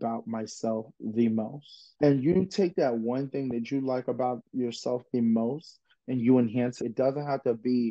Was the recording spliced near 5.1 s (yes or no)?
no